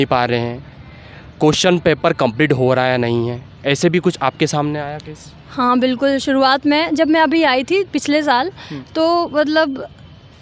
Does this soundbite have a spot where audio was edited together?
no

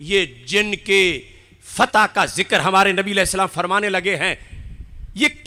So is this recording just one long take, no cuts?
yes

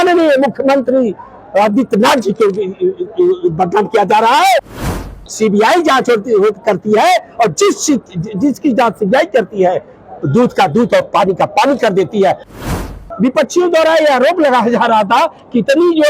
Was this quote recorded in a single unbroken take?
no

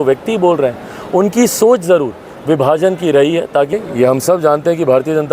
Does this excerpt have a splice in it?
yes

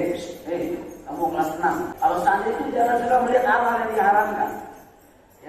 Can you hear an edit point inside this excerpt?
yes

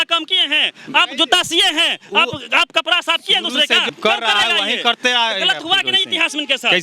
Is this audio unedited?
no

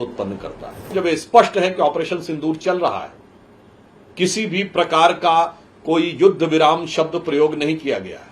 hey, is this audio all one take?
no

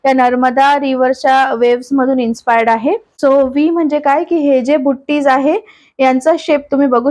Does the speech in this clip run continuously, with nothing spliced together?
no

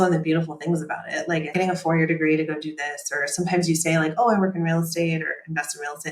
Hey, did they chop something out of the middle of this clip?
yes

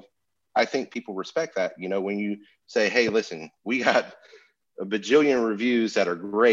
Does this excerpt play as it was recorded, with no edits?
yes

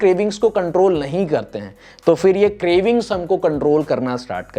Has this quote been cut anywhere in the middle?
no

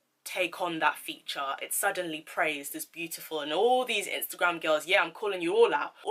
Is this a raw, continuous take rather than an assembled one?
yes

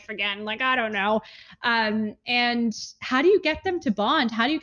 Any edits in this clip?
no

